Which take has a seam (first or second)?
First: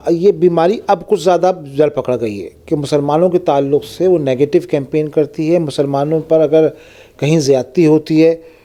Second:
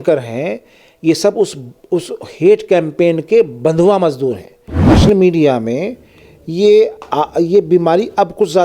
second